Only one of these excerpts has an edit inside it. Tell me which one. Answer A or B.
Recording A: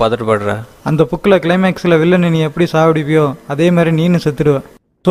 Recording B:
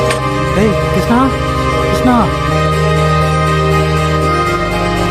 B